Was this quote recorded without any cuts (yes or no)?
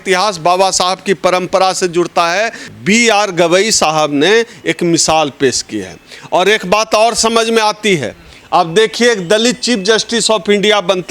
no